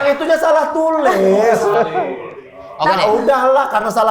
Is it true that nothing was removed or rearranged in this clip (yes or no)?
yes